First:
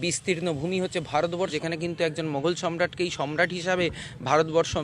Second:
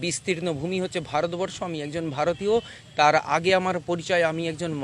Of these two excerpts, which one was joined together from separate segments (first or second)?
first